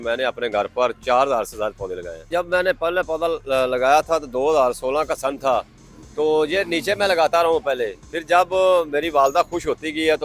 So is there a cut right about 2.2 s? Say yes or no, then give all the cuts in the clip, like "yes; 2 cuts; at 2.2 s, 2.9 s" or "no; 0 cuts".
yes; 1 cut; at 2.2 s